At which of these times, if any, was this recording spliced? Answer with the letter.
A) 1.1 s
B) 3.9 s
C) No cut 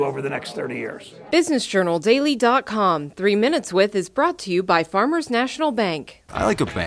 A